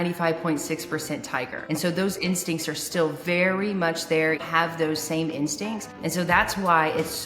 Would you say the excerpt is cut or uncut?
cut